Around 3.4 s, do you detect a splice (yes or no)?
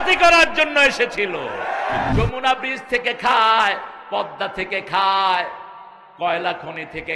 no